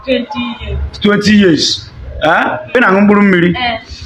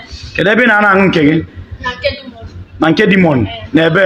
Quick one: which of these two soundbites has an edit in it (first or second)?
first